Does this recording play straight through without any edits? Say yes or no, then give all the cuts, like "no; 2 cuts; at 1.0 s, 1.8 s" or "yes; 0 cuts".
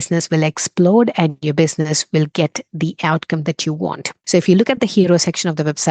no; 1 cut; at 4.1 s